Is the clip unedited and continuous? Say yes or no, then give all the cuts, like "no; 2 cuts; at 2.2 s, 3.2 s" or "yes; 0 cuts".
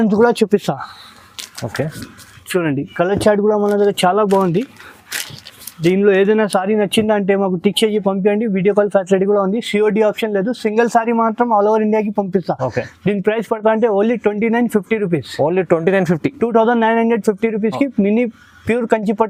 yes; 0 cuts